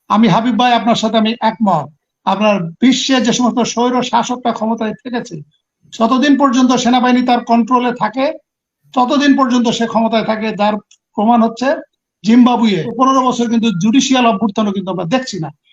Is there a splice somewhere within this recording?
yes; 1 cut; at 12.9 s

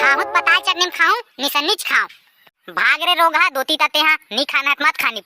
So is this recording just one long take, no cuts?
yes; 0 cuts

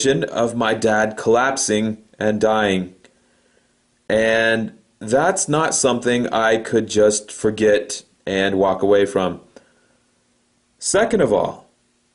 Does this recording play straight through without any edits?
no; 1 cut; at 6.3 s

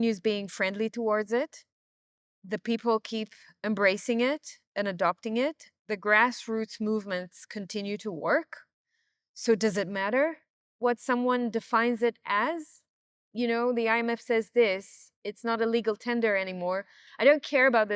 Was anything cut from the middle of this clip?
yes; 1 cut; at 17.0 s

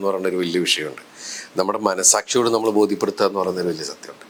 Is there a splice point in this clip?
no; 0 cuts

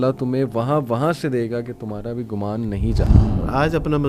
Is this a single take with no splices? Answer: no; 1 cut; at 3.0 s

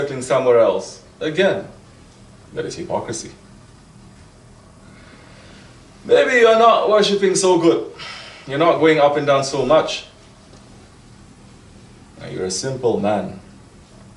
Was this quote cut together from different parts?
yes; 1 cut; at 6.4 s

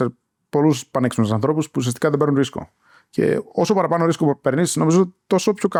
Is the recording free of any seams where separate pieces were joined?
yes; 0 cuts

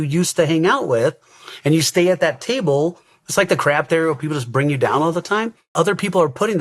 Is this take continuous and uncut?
no; 1 cut; at 5.6 s

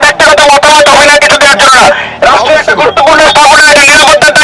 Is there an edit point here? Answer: no; 0 cuts

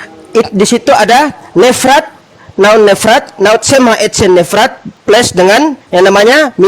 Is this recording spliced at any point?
yes; 2 cuts; at 4.9 s, 5.8 s

